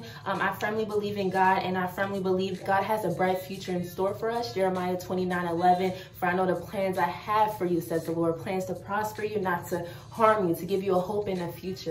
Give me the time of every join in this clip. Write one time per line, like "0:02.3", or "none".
0:02.6